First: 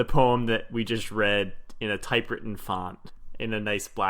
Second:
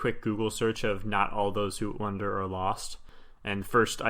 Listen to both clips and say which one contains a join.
first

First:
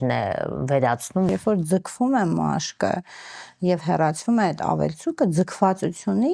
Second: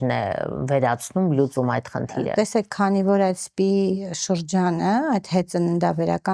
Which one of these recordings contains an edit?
first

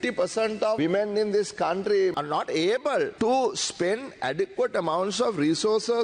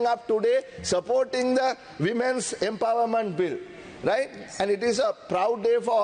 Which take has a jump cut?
first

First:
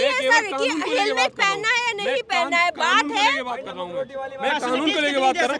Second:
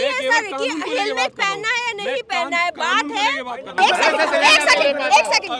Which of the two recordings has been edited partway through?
second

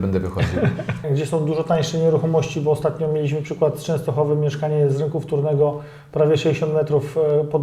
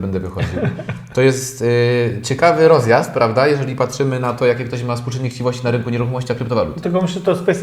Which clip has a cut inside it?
first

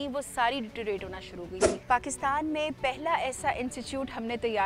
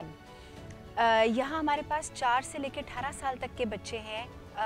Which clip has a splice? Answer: first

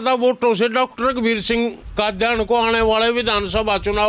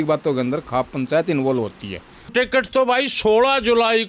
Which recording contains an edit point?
second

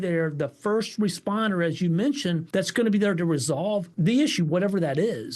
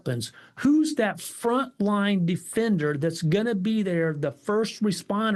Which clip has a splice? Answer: first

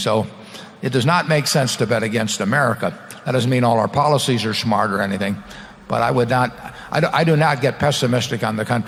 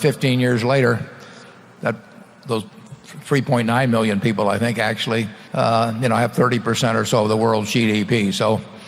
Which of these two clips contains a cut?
second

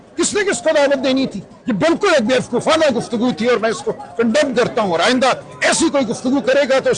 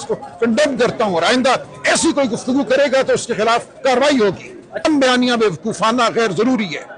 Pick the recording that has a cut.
second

